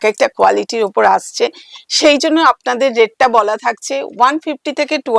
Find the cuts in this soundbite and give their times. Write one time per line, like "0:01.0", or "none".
none